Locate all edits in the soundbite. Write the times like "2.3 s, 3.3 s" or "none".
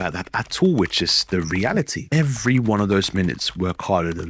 2.0 s